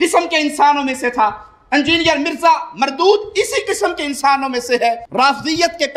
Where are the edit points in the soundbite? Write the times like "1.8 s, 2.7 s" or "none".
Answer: none

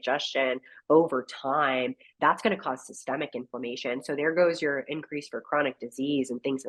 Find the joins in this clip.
none

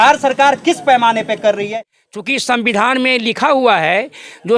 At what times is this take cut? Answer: 1.7 s

